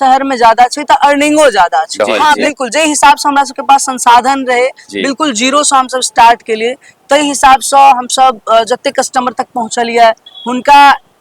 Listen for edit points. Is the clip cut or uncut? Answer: cut